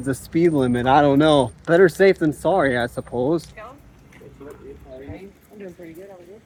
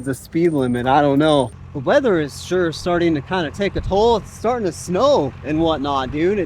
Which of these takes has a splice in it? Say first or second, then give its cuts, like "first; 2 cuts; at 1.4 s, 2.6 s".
second; 1 cut; at 1.6 s